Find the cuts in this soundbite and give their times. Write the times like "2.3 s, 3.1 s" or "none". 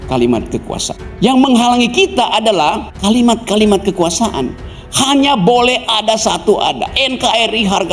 1.0 s, 2.9 s